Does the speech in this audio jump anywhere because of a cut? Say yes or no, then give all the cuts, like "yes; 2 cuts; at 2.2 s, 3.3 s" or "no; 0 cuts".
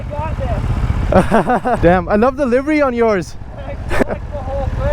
yes; 2 cuts; at 1.8 s, 4.0 s